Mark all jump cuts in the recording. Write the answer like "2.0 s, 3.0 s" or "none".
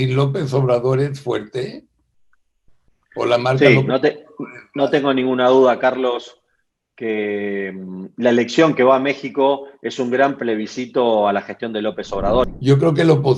12.5 s